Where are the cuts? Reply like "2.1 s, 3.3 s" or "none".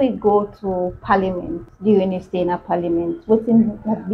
1.7 s